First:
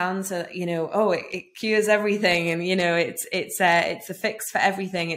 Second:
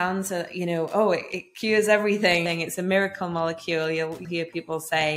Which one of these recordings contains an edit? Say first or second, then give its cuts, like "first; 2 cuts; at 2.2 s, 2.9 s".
second; 2 cuts; at 2.4 s, 4.2 s